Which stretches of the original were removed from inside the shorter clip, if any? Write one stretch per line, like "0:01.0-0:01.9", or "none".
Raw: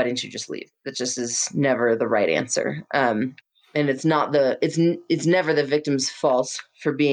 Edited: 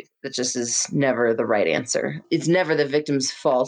0:02.8-0:05.0